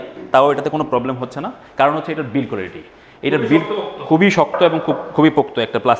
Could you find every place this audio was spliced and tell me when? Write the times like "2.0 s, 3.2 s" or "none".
none